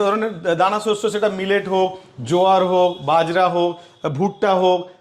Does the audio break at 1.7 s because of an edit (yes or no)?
no